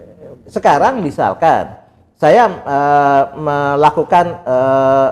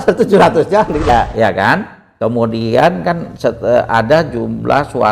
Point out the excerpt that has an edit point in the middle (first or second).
second